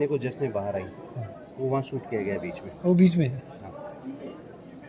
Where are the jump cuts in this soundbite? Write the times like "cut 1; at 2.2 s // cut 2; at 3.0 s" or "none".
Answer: none